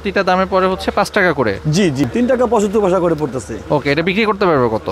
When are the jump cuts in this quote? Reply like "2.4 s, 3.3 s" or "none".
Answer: 2.0 s